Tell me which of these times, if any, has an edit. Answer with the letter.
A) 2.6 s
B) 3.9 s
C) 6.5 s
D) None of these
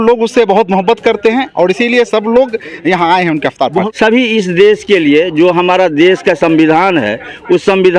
B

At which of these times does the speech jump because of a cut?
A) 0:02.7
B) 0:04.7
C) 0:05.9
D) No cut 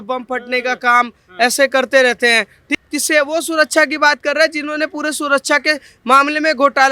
A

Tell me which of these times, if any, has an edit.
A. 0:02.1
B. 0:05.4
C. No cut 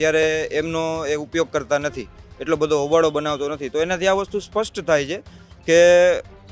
C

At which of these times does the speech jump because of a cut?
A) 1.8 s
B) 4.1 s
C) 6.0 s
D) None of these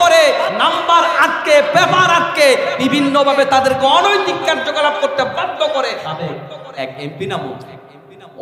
C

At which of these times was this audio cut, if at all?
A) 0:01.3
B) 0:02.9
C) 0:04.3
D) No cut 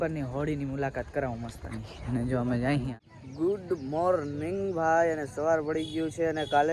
B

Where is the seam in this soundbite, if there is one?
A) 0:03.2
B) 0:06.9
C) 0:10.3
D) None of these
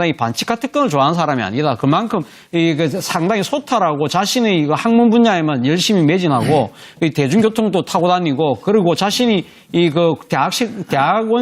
C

